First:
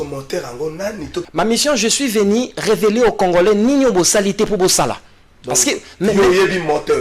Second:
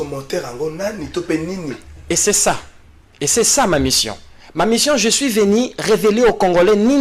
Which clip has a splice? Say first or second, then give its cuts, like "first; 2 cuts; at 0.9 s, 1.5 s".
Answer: first; 1 cut; at 1.2 s